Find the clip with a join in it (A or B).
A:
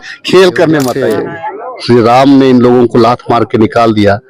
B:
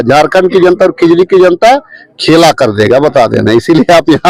A